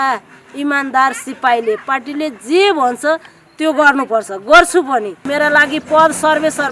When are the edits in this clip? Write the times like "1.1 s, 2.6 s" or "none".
5.2 s